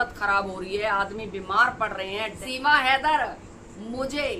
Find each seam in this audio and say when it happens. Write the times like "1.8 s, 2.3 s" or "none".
2.4 s